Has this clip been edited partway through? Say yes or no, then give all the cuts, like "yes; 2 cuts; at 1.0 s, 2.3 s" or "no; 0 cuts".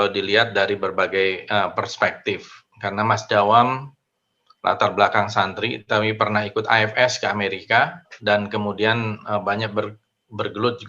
yes; 1 cut; at 8.1 s